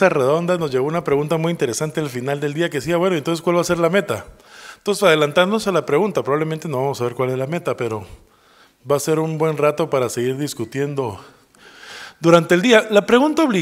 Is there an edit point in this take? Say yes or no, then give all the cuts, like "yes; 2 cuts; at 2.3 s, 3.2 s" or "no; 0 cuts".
no; 0 cuts